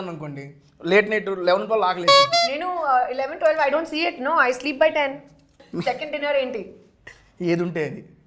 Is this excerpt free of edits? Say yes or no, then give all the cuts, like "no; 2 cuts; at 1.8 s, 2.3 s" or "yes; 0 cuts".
no; 1 cut; at 5.6 s